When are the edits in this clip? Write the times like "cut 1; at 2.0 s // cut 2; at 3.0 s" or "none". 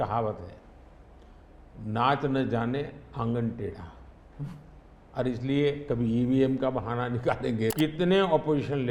cut 1; at 7.7 s